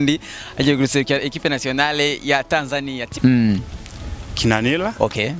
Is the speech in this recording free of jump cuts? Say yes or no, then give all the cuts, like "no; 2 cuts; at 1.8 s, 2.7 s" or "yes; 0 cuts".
no; 1 cut; at 3.0 s